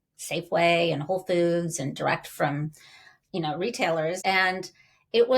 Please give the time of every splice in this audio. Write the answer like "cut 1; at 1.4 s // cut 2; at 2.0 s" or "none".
cut 1; at 4.2 s